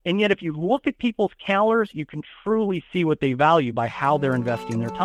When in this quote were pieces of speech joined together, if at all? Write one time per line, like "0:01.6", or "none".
none